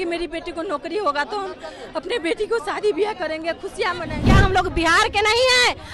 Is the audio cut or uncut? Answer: cut